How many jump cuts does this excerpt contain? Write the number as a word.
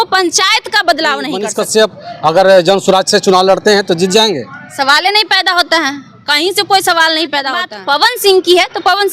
two